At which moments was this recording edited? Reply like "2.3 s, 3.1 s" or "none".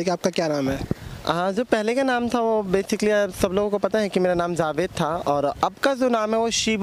none

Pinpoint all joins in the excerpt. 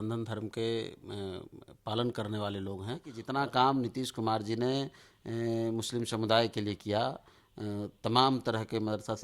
3.2 s

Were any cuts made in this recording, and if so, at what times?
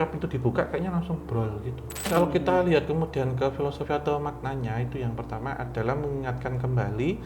2.0 s

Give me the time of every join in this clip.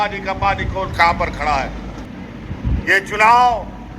2.0 s

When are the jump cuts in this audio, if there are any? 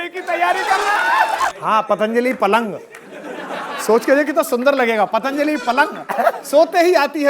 1.5 s

